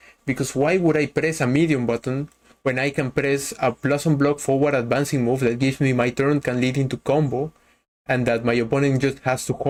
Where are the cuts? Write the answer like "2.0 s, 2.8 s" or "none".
none